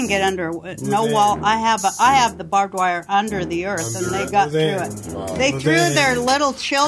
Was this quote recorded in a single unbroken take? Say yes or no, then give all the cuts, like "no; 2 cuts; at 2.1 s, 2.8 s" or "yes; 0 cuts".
yes; 0 cuts